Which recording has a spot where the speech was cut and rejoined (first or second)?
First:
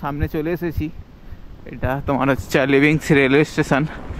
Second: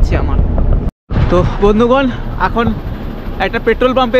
second